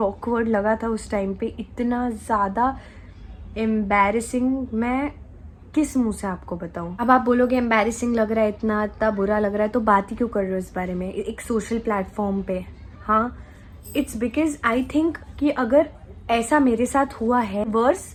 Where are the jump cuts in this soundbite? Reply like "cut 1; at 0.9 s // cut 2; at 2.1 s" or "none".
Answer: none